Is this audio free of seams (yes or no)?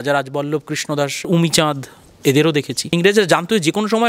no